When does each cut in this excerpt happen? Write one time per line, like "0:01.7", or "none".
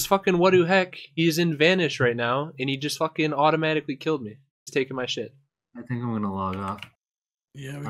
none